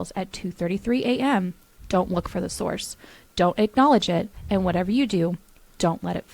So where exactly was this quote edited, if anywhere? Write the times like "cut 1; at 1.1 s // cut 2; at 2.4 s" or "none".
none

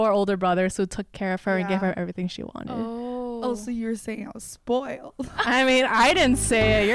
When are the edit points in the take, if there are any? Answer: none

